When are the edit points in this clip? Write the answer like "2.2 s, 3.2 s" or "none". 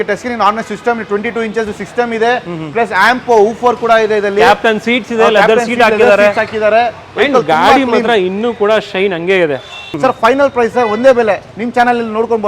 9.8 s